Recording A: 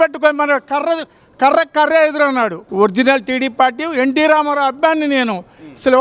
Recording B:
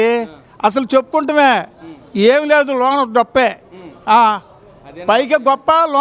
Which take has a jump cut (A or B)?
A